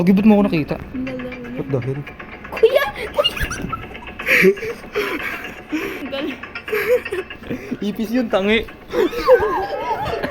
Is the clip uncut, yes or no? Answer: yes